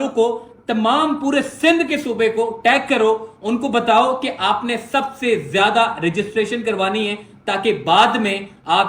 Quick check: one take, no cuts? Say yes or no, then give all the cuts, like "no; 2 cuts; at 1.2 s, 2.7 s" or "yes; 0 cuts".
yes; 0 cuts